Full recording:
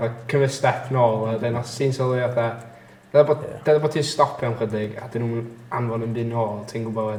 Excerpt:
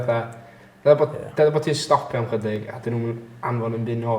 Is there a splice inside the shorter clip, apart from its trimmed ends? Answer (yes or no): no